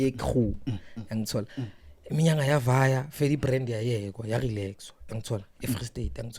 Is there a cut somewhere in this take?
no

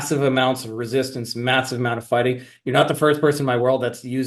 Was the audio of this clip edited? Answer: no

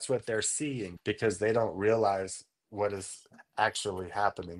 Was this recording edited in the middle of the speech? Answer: no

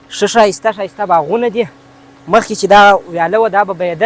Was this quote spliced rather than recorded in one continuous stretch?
no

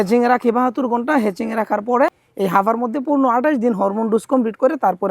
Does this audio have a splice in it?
yes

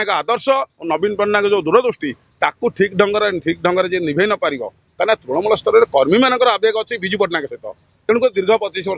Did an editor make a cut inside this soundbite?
no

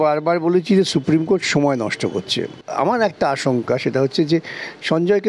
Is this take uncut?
no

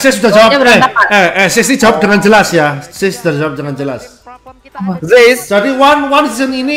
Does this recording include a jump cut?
no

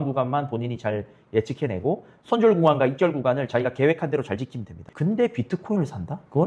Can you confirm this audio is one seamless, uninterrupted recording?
no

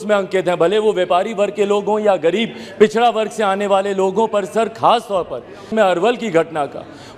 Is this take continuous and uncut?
no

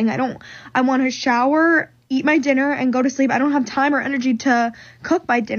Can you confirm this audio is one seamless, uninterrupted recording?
yes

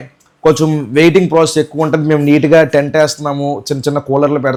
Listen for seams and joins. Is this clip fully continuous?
yes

